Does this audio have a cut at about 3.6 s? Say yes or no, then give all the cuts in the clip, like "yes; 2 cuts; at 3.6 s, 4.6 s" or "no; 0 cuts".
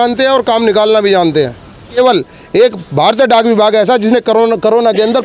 no; 1 cut; at 2.0 s